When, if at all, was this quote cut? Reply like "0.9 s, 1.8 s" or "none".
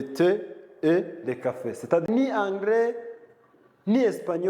2.0 s